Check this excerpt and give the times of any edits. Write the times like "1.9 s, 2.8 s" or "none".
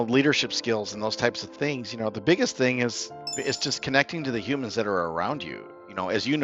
none